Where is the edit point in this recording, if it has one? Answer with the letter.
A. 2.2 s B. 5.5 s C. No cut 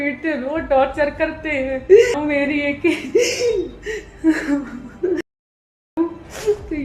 A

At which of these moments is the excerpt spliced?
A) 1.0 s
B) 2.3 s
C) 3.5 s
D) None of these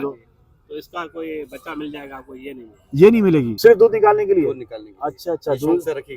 C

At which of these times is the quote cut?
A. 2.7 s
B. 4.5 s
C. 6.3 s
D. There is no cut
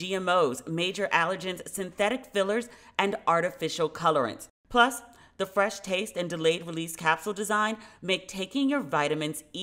D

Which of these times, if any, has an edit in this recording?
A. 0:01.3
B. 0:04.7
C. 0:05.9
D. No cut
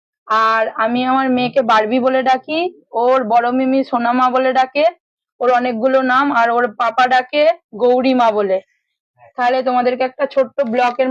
A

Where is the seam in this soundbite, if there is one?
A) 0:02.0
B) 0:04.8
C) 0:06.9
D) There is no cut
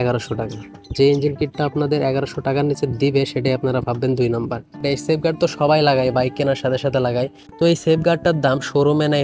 B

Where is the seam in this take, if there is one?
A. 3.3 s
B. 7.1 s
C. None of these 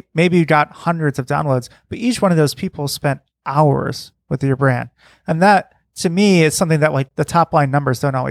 B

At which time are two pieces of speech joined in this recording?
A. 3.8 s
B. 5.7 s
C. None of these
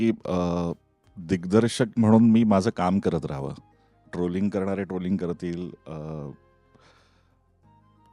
C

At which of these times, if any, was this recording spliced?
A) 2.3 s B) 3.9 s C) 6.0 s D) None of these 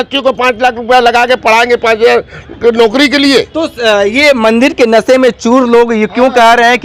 D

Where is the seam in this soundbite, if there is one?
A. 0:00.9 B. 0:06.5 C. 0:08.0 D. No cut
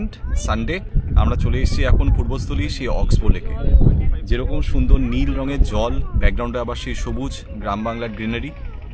A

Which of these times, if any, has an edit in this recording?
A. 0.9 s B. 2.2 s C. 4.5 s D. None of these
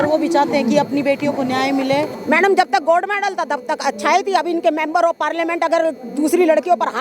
B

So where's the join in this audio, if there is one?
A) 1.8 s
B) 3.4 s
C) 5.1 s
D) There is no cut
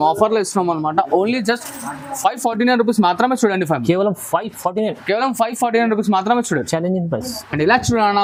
D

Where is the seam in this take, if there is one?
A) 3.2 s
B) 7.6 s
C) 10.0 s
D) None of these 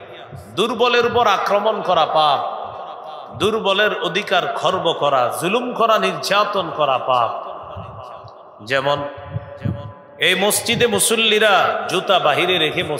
D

